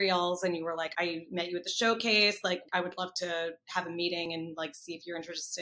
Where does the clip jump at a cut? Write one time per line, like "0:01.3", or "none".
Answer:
0:00.9
0:02.6